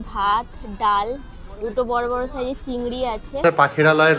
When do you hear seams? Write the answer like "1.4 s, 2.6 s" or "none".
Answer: 3.3 s